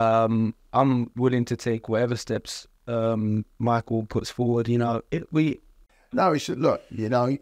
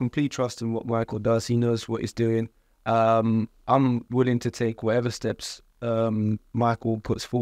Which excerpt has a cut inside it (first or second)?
first